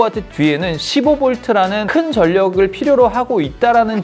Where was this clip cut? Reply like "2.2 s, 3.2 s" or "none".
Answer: none